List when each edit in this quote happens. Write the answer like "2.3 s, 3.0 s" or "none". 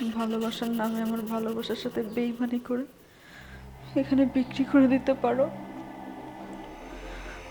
5.5 s